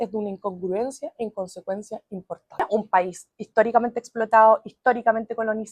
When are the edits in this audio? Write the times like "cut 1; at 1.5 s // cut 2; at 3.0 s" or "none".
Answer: cut 1; at 2.6 s